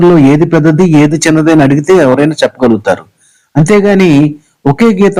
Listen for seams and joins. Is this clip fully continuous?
yes; 0 cuts

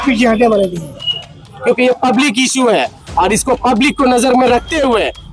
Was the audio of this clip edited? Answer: yes; 1 cut; at 1.5 s

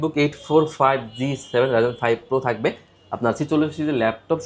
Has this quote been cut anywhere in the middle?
no; 0 cuts

